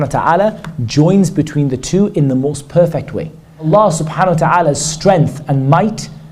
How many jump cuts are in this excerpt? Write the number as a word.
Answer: one